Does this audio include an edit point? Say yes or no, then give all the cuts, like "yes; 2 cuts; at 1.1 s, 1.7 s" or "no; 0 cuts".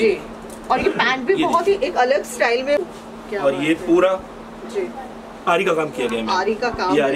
yes; 1 cut; at 2.8 s